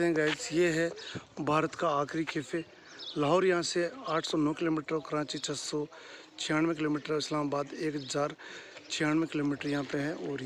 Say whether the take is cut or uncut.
uncut